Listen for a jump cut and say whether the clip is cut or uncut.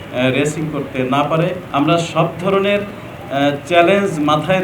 cut